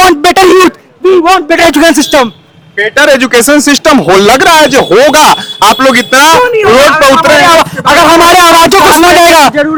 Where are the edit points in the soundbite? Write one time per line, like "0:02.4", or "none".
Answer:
none